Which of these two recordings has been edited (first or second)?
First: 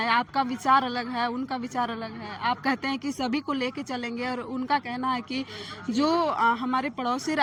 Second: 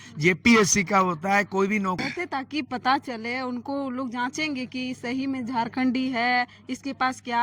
second